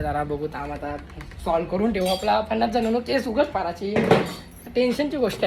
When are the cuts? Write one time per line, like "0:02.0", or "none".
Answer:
none